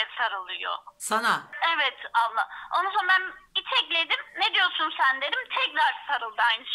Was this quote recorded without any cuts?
no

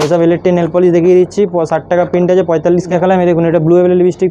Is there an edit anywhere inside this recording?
yes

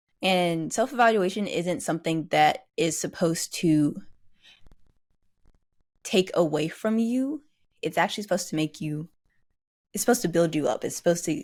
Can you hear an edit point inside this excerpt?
no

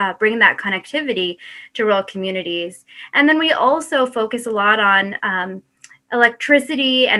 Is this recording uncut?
yes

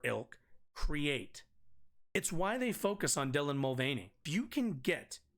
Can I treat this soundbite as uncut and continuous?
no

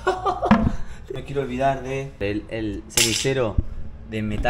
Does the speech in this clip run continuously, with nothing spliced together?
no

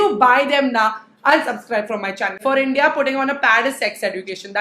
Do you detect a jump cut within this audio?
yes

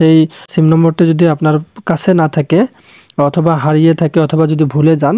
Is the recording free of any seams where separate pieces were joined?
yes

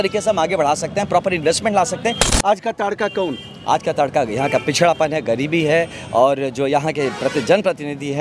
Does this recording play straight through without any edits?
no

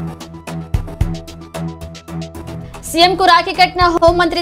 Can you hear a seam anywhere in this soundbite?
yes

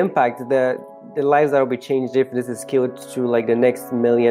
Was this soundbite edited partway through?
no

